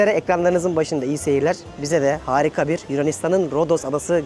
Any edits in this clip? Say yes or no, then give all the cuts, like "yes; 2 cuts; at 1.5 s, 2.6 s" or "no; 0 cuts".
no; 0 cuts